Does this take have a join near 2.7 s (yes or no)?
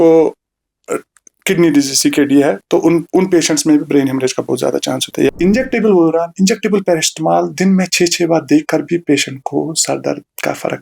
no